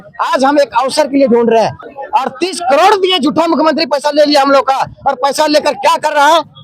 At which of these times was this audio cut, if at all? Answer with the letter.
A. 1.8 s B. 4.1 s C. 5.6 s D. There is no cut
A